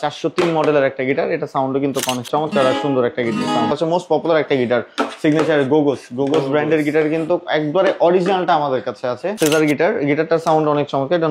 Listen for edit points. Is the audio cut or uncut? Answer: cut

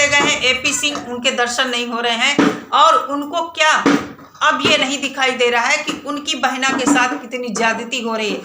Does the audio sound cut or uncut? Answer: cut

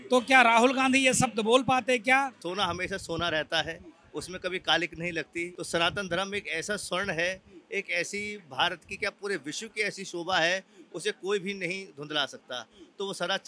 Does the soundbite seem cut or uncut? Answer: cut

